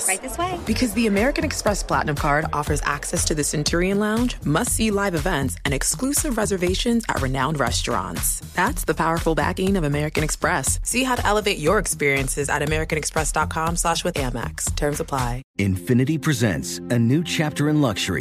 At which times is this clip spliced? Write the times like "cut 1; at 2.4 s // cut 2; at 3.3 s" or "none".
cut 1; at 15.4 s